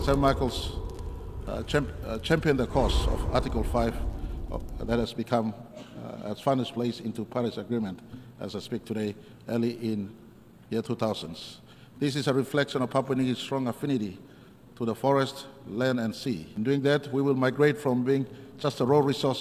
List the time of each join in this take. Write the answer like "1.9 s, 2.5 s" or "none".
16.5 s